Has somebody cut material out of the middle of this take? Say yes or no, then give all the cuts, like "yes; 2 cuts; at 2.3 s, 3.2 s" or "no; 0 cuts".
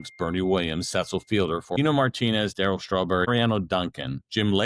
yes; 2 cuts; at 1.8 s, 3.3 s